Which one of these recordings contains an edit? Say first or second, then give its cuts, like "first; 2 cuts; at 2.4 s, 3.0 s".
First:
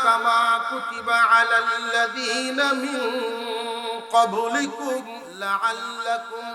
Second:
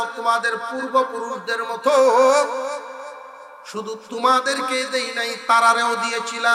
first; 1 cut; at 5.2 s